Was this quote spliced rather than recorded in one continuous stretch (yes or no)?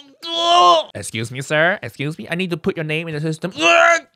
yes